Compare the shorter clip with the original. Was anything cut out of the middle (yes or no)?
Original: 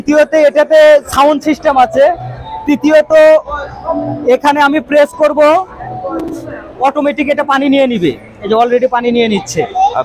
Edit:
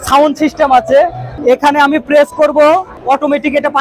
yes